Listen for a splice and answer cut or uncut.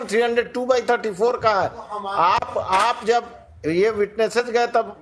uncut